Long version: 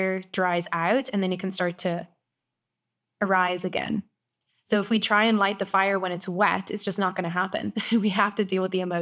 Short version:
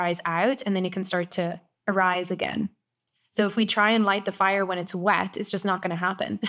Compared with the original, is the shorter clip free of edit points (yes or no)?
no